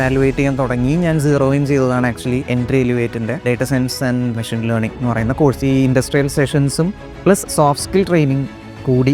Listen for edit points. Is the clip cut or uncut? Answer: cut